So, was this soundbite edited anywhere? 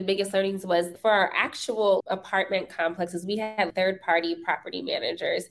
yes; 3 cuts; at 0.9 s, 2.0 s, 3.7 s

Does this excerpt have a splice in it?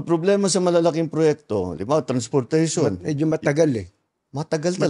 no; 0 cuts

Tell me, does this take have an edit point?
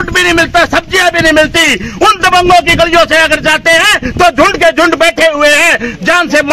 no; 0 cuts

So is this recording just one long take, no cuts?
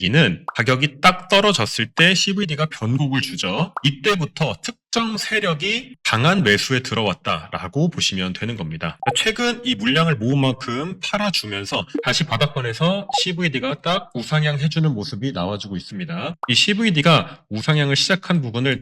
no; 1 cut; at 9.0 s

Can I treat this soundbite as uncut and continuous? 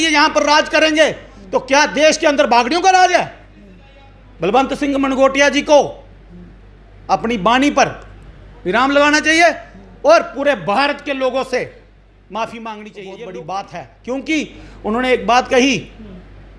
no; 1 cut; at 13.2 s

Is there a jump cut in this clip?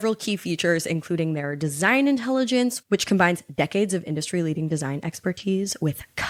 no; 0 cuts

